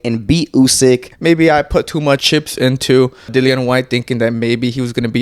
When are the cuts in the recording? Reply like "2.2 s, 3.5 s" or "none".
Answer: 1.1 s, 2.2 s, 3.3 s